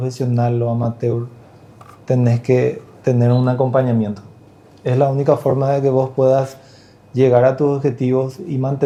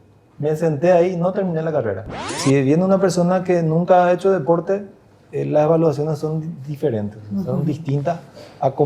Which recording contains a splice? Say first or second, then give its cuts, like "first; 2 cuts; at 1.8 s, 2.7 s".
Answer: second; 1 cut; at 2.4 s